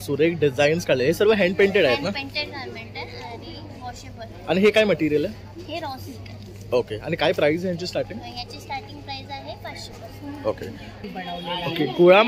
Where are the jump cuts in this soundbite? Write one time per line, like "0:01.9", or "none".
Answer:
0:11.0